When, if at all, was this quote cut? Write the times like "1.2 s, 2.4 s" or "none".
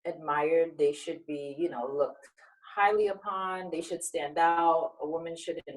none